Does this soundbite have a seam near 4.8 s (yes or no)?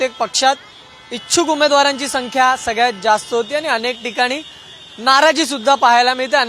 no